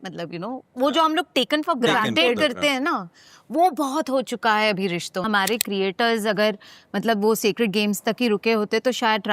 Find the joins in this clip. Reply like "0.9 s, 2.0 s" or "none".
5.2 s